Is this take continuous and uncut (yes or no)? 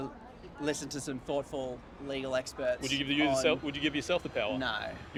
yes